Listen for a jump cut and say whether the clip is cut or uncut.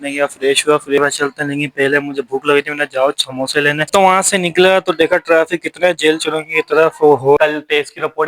cut